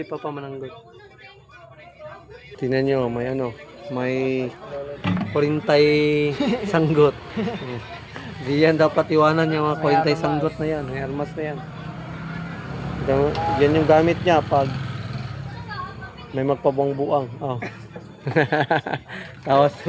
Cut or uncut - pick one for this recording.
cut